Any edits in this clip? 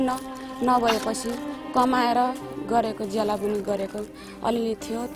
no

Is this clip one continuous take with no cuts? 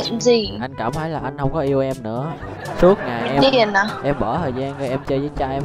yes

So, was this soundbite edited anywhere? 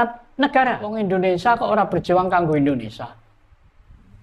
yes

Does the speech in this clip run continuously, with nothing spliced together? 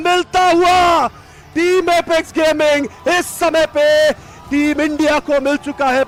yes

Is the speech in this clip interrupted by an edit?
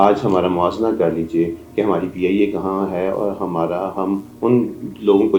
no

